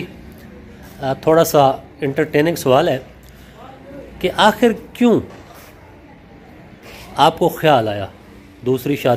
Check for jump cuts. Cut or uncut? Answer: uncut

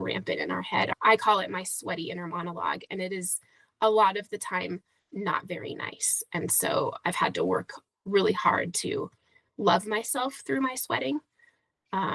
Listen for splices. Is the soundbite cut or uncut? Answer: uncut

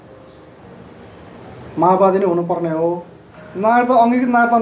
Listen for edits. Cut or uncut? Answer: cut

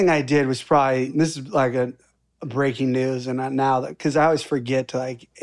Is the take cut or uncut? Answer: cut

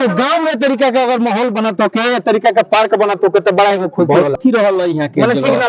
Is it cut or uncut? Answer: cut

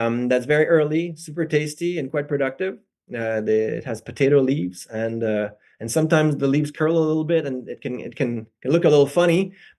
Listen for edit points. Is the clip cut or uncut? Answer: uncut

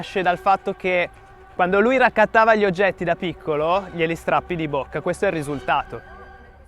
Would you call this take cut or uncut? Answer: uncut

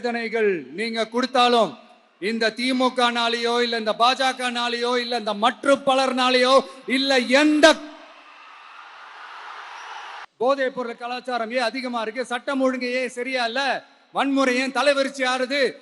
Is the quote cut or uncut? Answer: cut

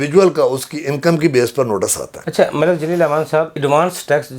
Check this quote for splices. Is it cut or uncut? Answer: uncut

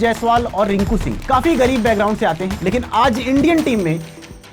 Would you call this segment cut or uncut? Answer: uncut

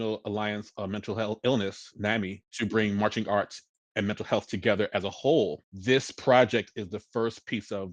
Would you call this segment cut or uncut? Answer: cut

